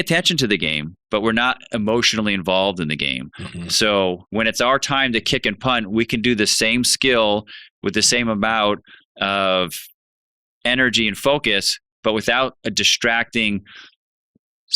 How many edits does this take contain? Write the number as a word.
one